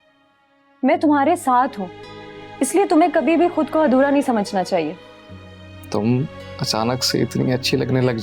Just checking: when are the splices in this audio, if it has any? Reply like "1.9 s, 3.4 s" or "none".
none

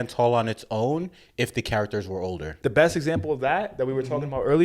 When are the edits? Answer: 2.5 s

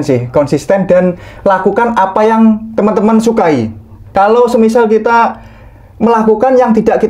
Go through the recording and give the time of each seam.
4.0 s

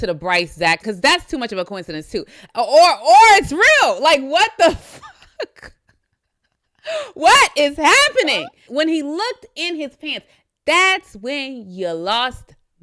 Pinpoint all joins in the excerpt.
0.8 s, 8.6 s

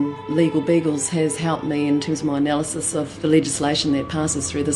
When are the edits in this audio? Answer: none

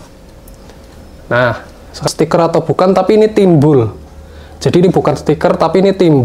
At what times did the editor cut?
2.0 s

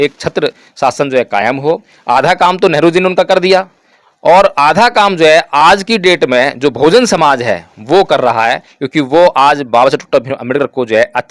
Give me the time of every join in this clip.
1.9 s

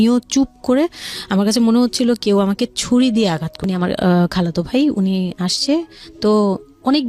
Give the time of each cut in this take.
3.5 s

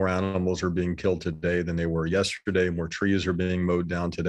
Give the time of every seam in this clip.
none

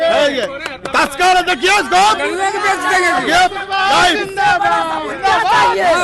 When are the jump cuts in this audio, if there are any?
none

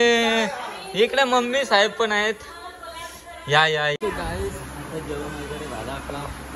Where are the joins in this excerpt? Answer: 4.0 s

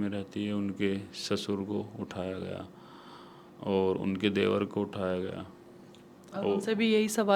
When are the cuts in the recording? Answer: none

